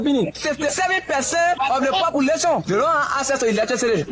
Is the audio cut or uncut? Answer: cut